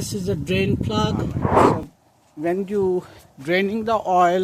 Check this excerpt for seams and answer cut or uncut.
cut